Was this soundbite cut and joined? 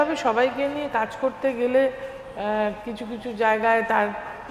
no; 0 cuts

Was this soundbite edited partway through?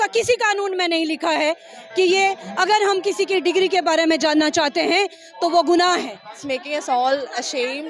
yes; 1 cut; at 6.4 s

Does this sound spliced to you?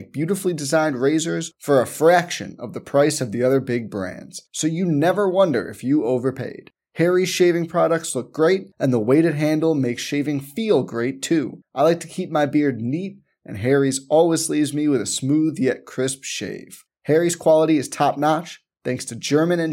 no; 0 cuts

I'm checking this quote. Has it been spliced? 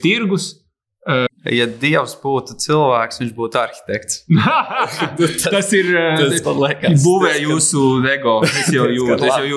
yes; 1 cut; at 1.3 s

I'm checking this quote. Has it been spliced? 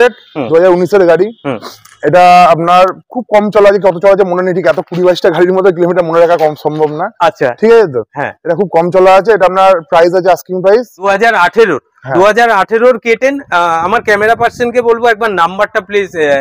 yes; 1 cut; at 11.1 s

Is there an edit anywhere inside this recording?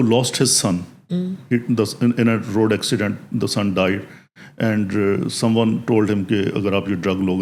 no; 0 cuts

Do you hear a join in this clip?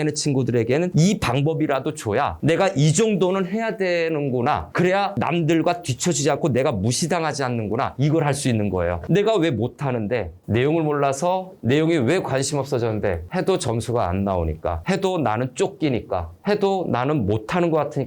no; 0 cuts

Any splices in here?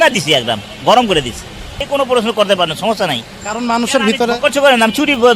yes; 1 cut; at 1.8 s

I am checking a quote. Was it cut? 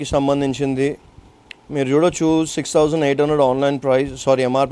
no; 0 cuts

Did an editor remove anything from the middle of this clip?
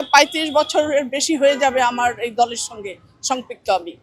no; 0 cuts

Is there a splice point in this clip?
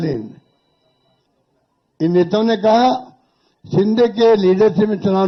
no; 0 cuts

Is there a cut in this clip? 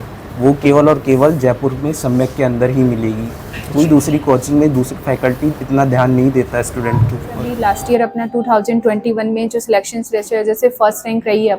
yes; 1 cut; at 7.5 s

